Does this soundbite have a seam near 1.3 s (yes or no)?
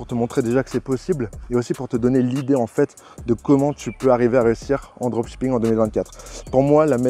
no